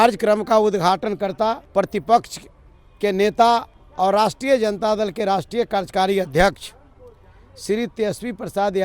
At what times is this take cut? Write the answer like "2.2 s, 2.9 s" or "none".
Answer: 1.6 s, 3.8 s